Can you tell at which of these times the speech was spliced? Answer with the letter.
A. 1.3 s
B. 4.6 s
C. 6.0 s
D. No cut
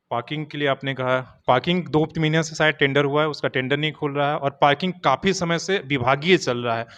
D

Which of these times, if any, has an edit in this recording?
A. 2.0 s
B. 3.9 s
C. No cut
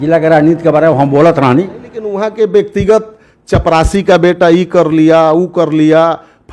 A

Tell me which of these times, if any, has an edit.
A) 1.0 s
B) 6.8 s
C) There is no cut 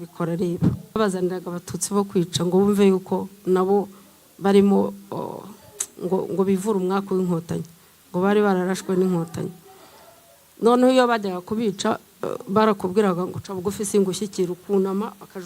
A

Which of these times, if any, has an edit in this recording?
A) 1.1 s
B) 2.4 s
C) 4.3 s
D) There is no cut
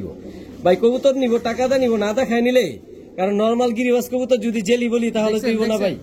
D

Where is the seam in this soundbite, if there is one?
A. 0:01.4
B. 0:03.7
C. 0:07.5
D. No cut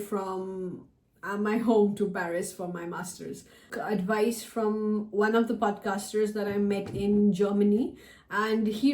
B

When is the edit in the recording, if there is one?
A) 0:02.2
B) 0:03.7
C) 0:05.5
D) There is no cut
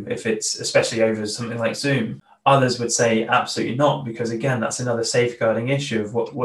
A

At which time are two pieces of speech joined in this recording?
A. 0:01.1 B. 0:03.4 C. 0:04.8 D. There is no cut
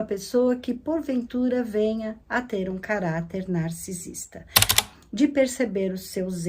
C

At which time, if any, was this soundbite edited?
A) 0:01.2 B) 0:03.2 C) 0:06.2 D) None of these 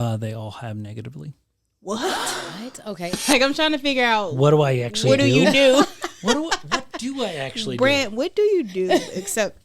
B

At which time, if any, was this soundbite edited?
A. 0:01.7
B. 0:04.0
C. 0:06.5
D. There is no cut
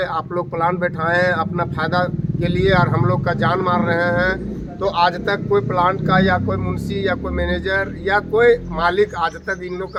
D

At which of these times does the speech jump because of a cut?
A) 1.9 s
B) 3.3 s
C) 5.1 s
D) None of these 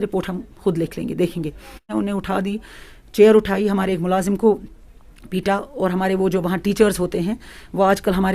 A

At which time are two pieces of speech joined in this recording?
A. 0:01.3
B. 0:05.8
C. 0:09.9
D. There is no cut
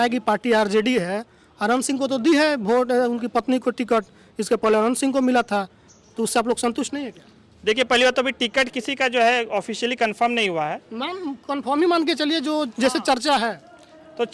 D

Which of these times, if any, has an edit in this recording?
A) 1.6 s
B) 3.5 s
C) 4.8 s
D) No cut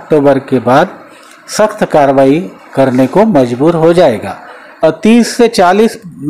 C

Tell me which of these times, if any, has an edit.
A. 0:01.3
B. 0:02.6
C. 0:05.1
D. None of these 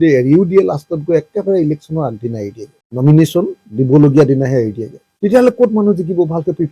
D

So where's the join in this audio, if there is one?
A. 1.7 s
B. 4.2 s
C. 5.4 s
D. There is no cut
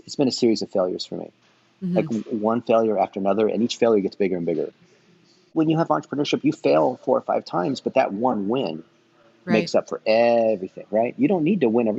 C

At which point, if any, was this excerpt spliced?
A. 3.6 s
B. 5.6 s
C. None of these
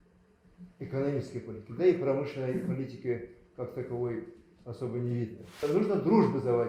B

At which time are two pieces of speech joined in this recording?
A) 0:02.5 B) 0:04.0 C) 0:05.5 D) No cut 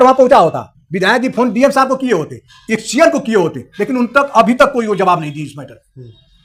D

